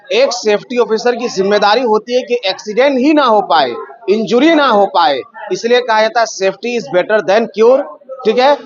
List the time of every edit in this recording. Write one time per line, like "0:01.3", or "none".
none